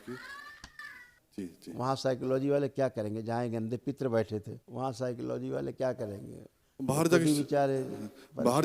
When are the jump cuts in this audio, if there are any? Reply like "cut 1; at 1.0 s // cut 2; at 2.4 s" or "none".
cut 1; at 1.1 s // cut 2; at 4.6 s